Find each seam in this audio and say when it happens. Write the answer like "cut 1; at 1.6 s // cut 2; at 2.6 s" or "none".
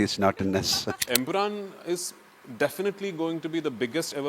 cut 1; at 1.0 s